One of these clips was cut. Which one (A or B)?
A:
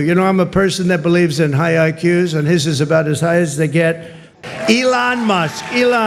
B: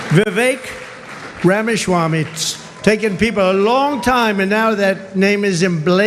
A